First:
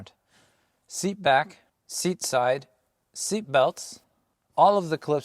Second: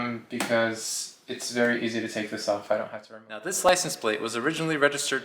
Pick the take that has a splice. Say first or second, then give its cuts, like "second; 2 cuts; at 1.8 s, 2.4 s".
second; 1 cut; at 3.0 s